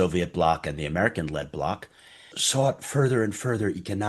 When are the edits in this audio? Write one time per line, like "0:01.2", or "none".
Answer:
0:02.4